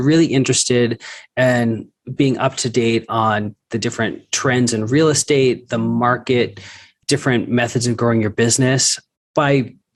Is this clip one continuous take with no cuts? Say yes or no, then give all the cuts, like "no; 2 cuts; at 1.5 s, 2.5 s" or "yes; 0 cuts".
yes; 0 cuts